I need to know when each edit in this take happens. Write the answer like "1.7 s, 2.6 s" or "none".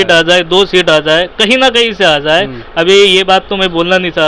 none